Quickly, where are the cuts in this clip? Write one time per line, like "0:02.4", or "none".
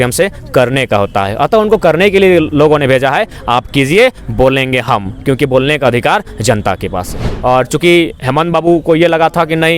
0:07.2